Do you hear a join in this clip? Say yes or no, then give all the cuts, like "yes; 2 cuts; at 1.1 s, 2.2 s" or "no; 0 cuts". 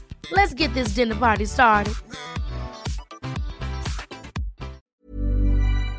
yes; 1 cut; at 4.8 s